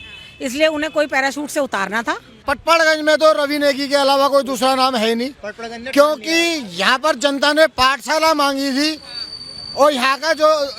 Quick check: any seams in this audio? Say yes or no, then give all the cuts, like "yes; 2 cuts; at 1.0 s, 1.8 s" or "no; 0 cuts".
yes; 1 cut; at 2.5 s